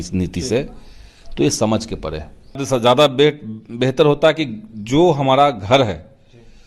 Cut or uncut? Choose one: cut